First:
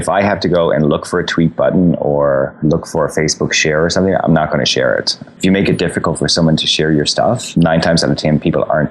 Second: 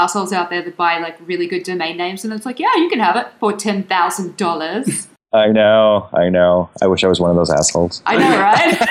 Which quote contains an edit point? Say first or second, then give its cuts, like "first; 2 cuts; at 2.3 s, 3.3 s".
first; 1 cut; at 5.2 s